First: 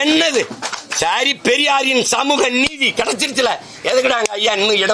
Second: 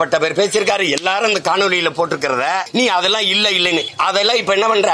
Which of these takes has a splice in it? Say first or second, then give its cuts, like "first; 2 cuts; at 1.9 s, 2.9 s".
second; 2 cuts; at 2.7 s, 3.9 s